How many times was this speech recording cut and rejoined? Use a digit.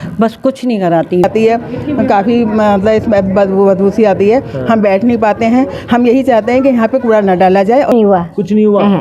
2